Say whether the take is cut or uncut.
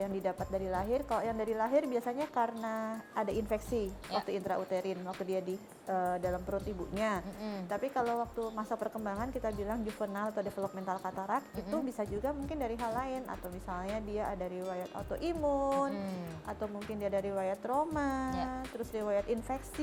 uncut